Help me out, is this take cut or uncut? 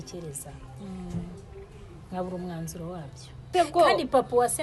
cut